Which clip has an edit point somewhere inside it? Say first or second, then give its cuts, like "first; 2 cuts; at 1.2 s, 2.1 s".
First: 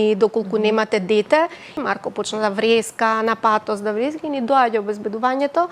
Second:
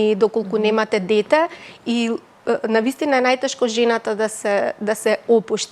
first; 1 cut; at 1.7 s